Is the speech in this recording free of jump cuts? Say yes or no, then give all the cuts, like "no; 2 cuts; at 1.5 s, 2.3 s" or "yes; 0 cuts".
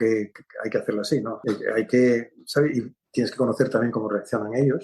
no; 1 cut; at 1.4 s